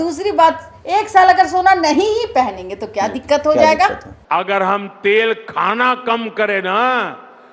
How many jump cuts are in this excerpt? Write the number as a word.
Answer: one